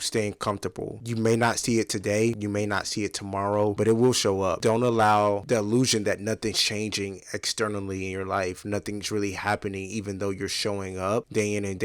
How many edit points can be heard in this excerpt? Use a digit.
2